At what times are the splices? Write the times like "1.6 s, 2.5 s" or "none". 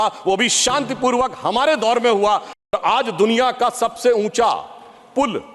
2.6 s